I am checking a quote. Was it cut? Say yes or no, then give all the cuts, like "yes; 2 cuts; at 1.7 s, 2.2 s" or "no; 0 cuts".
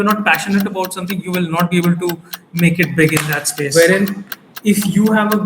yes; 1 cut; at 3.7 s